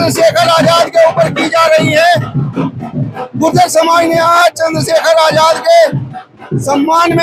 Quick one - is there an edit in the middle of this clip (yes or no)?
no